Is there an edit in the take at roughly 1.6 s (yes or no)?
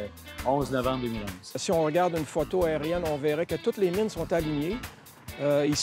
yes